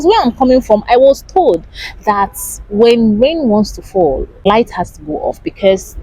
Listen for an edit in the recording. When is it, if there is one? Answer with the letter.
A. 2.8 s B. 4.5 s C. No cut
B